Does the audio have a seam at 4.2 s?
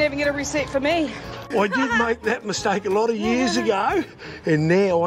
no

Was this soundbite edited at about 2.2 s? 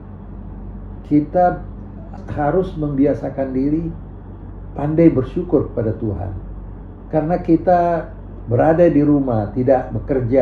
yes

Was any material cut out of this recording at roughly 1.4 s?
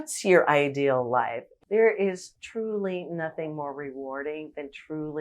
yes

